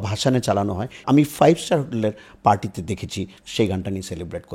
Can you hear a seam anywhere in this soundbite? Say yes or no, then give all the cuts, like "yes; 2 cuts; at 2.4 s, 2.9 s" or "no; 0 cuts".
yes; 2 cuts; at 1.0 s, 3.4 s